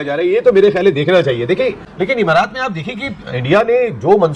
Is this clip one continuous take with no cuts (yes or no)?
no